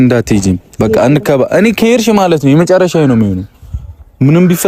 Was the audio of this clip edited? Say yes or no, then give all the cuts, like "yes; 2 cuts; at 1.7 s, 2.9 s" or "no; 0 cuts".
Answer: no; 0 cuts